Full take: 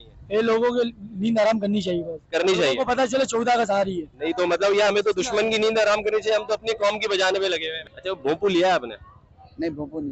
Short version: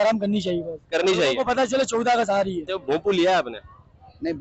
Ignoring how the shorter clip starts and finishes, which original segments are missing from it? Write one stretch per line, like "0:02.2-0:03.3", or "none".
0:04.1-0:08.0

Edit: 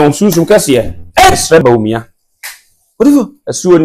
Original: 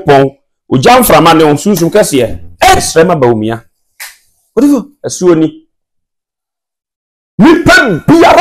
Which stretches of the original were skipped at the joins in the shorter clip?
0:03.1-0:03.2

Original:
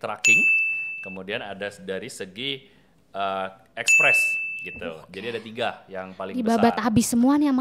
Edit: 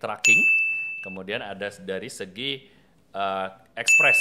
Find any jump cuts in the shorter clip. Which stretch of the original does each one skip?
none

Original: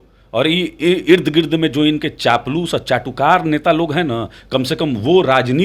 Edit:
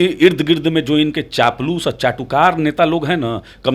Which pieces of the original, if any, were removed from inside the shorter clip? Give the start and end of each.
none

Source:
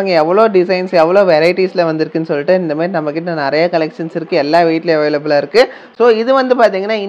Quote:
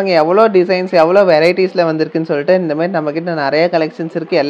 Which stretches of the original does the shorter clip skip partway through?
none

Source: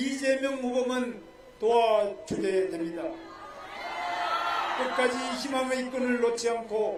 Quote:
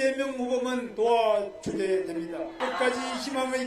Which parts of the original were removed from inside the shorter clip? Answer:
0:01.1-0:01.5
0:03.2-0:04.7

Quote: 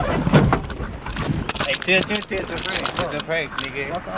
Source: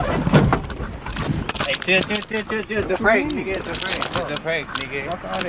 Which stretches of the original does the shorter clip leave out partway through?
0:02.3-0:03.5

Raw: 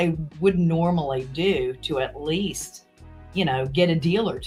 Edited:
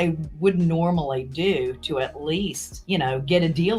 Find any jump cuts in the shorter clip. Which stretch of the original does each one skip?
0:02.7-0:03.1

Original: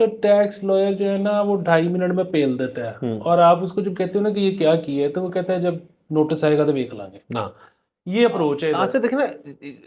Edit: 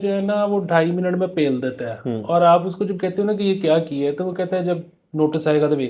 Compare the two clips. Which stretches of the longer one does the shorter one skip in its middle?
none

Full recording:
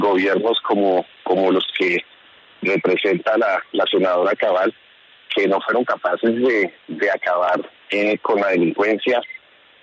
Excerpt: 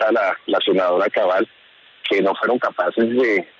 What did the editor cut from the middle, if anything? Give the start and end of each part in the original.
none

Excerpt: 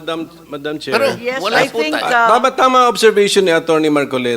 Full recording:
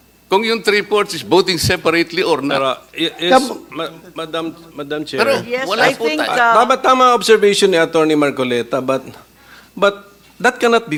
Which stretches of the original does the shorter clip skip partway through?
none

